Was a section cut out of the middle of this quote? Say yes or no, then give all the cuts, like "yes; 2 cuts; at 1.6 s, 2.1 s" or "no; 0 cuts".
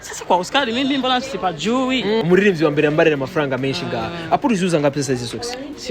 yes; 1 cut; at 2.2 s